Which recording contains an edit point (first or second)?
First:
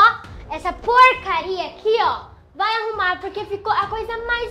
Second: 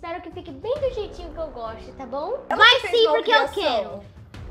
second